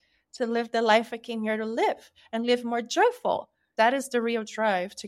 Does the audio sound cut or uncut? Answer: cut